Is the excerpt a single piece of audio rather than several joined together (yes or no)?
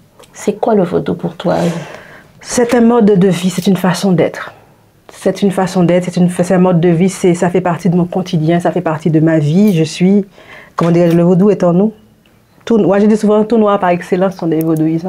yes